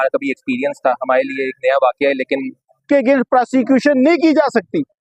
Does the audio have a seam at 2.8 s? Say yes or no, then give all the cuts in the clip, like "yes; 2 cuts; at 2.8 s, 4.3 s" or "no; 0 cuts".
yes; 1 cut; at 2.8 s